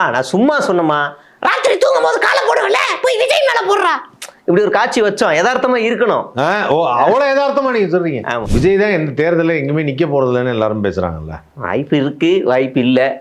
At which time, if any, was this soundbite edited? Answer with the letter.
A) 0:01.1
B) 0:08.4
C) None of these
B